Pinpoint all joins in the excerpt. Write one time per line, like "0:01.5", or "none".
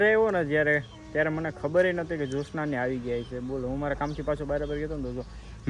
none